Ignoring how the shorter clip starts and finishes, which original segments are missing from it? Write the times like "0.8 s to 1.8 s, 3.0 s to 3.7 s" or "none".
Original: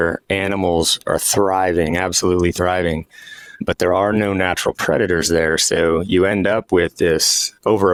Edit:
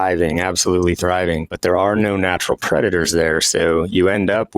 3.1 s to 3.7 s